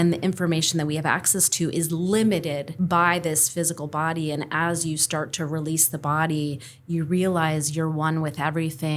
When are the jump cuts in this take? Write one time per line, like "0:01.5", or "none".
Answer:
0:02.7